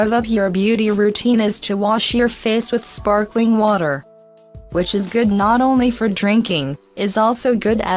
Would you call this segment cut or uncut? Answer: cut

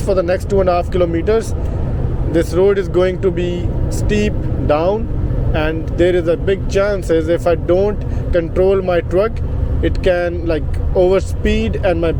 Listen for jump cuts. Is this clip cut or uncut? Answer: uncut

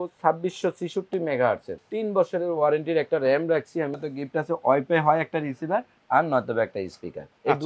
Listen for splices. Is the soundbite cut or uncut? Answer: cut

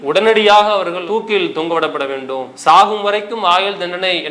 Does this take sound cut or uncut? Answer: uncut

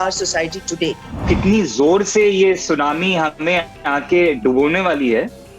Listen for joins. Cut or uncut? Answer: cut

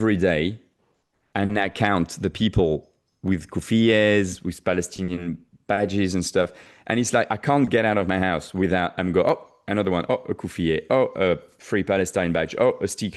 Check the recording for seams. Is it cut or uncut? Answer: uncut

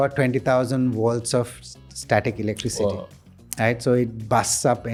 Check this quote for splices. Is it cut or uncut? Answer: uncut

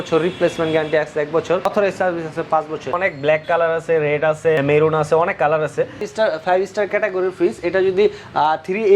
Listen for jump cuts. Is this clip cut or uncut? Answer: cut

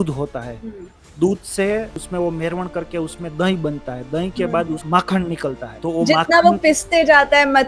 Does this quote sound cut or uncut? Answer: cut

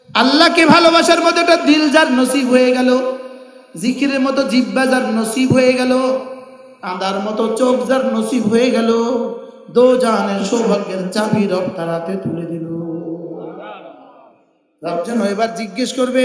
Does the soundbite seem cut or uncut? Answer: uncut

